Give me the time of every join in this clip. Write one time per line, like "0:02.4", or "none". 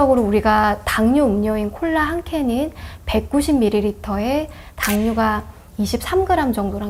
none